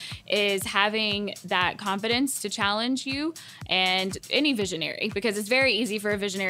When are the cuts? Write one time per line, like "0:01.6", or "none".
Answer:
0:04.2